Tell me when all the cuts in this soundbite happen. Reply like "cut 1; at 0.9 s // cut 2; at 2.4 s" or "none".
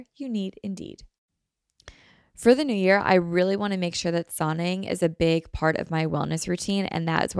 cut 1; at 1.1 s